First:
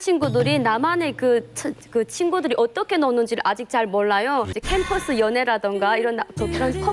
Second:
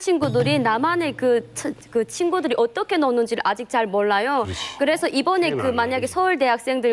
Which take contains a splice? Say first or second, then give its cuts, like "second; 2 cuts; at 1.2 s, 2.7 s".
first; 1 cut; at 4.6 s